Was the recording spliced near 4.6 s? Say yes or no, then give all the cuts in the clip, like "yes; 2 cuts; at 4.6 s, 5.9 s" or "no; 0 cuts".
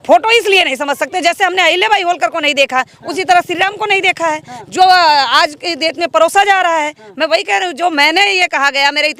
no; 0 cuts